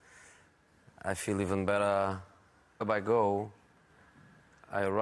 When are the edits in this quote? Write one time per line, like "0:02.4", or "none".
none